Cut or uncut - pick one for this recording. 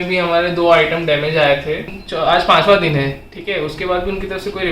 cut